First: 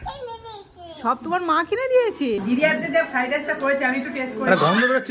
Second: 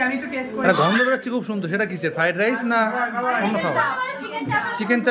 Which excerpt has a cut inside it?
first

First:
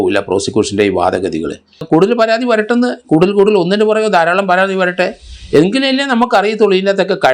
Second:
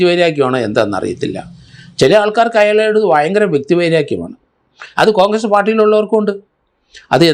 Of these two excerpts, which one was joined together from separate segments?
first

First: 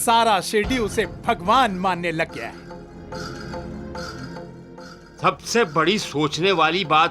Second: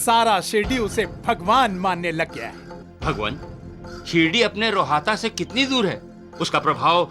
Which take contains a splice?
second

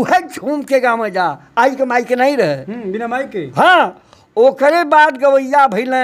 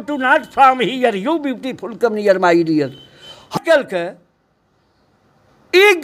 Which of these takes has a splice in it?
second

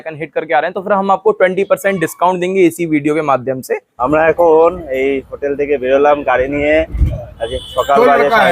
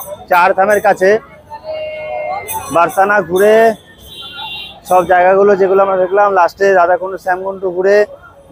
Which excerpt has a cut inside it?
first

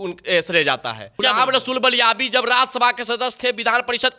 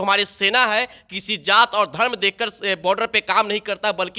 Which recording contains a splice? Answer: first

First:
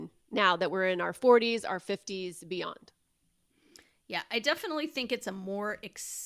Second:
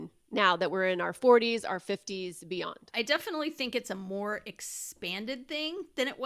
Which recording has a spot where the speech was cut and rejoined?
second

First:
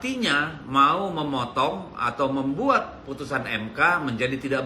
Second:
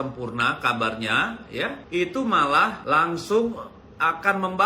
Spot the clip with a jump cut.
second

